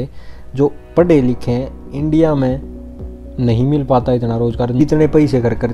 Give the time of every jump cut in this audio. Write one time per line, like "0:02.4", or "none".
0:04.8